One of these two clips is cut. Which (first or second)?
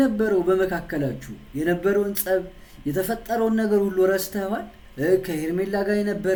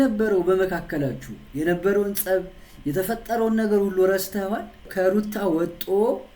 second